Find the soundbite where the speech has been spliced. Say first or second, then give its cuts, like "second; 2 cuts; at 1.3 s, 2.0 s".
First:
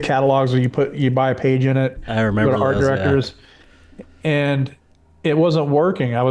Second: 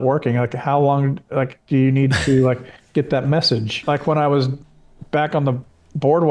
second; 1 cut; at 3.7 s